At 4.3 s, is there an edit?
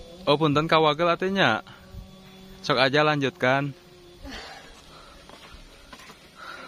yes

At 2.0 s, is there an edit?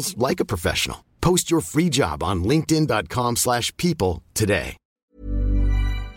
no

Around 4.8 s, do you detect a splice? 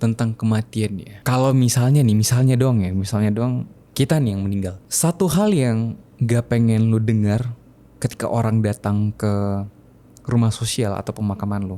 yes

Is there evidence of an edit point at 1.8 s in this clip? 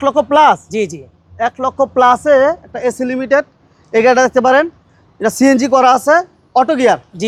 no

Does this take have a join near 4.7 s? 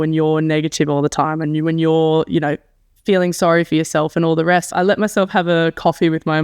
yes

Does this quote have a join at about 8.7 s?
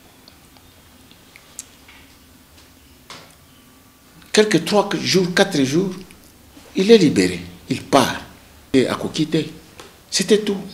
yes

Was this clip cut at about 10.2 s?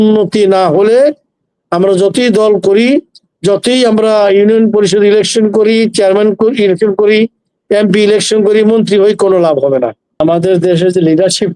yes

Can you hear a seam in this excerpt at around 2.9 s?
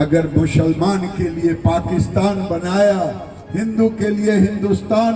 no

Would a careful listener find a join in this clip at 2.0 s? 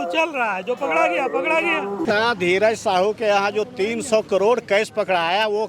yes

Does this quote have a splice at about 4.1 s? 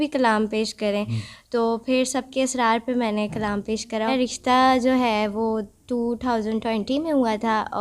yes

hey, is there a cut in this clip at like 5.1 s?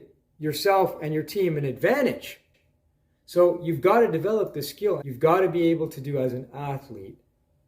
yes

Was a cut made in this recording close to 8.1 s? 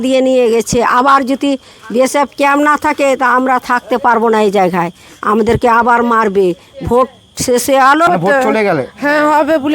yes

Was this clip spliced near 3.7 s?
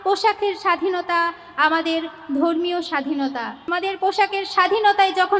yes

